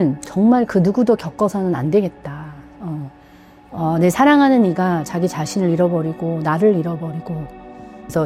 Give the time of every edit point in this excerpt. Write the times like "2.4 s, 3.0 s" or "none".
none

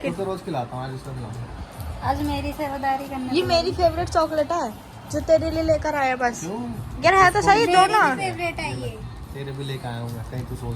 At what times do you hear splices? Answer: none

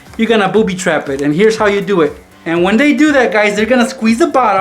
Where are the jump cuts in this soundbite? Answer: 2.3 s

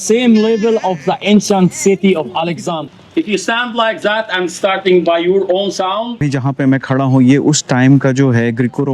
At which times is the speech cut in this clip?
2.8 s, 6.3 s

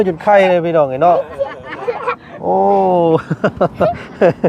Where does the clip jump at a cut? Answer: none

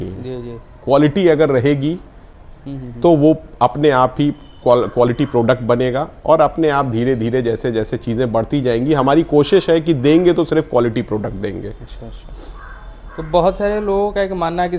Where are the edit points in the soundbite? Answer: none

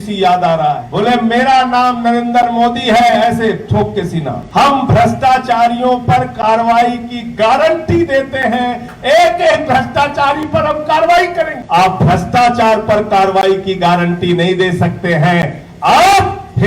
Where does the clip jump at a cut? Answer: 0.9 s, 4.4 s, 11.6 s

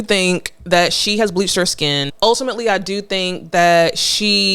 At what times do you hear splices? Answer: 2.1 s

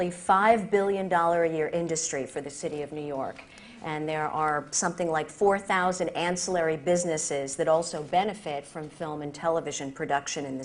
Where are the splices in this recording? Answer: 4.2 s

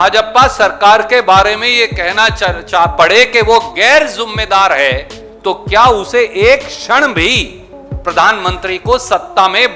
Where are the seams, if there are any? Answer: none

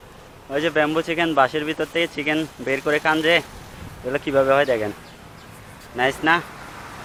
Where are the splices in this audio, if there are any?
none

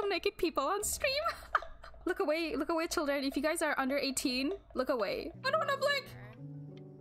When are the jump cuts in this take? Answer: 5.3 s

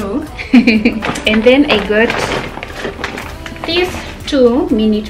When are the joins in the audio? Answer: 1.0 s

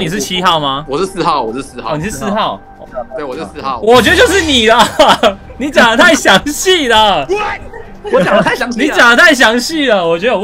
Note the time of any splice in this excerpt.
0.8 s, 2.8 s

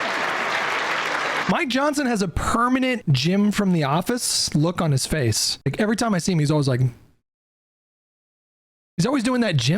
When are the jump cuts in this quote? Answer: 1.4 s, 3.0 s, 5.5 s

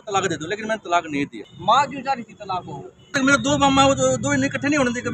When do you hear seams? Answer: 1.1 s, 3.1 s

